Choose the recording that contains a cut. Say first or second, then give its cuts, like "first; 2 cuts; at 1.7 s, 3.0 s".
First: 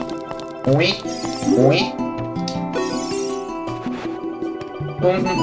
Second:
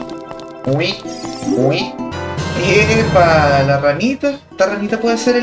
second; 1 cut; at 2.1 s